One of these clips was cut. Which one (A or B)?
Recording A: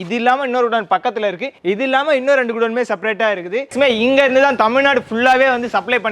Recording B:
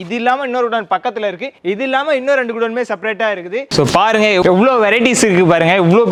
A